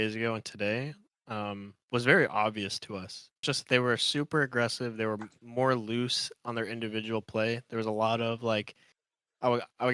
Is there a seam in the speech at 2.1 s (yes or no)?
no